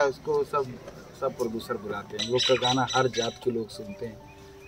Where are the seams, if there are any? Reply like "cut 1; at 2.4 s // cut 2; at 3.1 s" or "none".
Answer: cut 1; at 2.1 s